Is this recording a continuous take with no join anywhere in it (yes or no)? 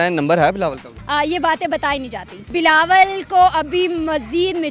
no